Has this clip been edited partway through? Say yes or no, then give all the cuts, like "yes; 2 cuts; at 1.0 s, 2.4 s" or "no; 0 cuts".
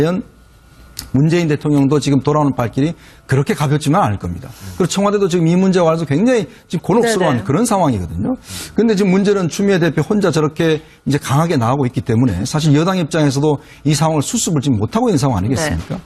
no; 0 cuts